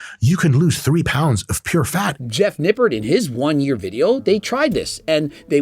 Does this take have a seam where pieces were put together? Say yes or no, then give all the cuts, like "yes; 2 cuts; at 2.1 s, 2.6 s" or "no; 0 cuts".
yes; 1 cut; at 2.1 s